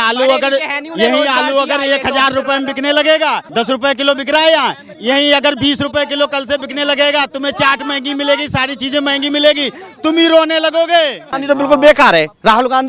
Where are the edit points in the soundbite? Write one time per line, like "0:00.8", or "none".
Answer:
0:03.4
0:11.3